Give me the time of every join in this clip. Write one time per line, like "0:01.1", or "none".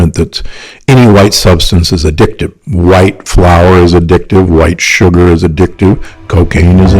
0:02.6